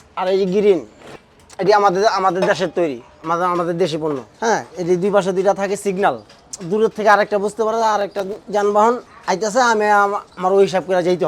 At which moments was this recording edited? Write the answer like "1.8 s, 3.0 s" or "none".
none